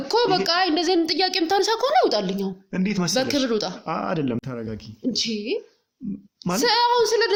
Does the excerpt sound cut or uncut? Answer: uncut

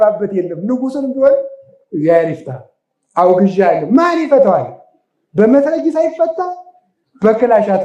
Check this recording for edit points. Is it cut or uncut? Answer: uncut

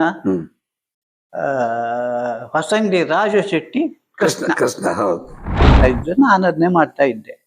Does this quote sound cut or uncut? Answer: cut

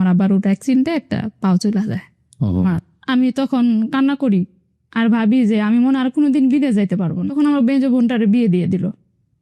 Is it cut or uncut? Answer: cut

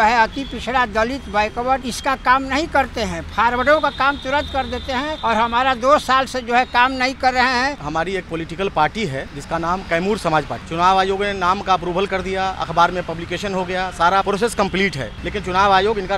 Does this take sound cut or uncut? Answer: cut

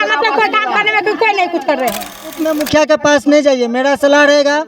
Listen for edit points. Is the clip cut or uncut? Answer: cut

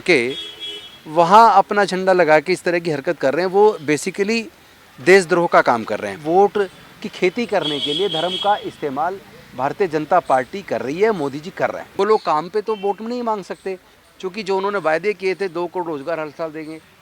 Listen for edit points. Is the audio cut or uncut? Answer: cut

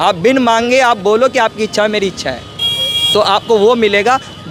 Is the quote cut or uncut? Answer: uncut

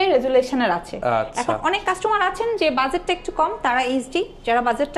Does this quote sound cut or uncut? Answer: uncut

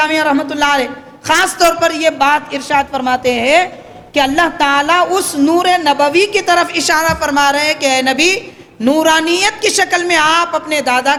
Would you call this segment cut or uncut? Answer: uncut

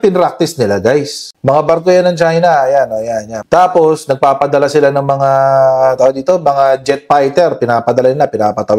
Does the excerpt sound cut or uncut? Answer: cut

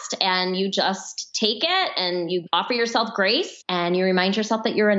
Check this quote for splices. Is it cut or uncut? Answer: cut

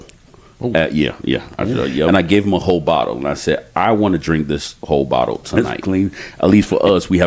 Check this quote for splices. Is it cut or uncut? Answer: cut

